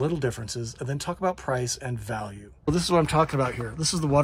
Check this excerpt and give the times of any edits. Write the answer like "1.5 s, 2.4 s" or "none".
2.7 s